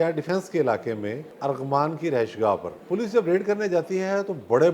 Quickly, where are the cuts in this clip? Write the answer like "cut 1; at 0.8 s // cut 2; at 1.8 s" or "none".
cut 1; at 1.3 s // cut 2; at 2.7 s